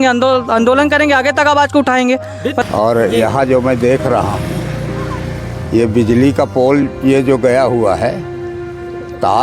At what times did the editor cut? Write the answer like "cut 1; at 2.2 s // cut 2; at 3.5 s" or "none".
cut 1; at 2.6 s